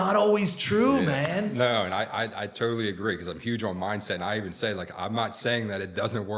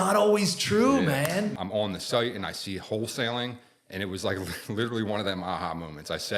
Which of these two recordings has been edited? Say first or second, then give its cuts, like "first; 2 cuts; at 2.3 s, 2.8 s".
second; 1 cut; at 1.5 s